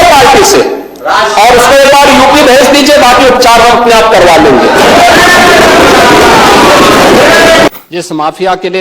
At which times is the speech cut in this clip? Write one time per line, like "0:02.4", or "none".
0:07.7